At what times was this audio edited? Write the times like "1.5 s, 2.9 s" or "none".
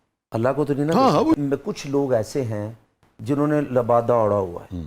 1.3 s